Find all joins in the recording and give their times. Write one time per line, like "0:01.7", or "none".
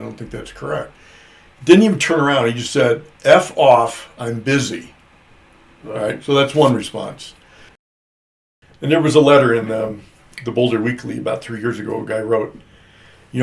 0:08.3